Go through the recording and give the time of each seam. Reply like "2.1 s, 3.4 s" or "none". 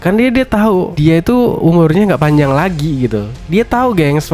0.9 s

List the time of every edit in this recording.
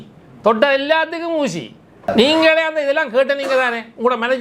2.1 s

